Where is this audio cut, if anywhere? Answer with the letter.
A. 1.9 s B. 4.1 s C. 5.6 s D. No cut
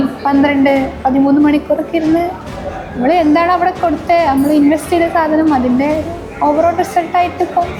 D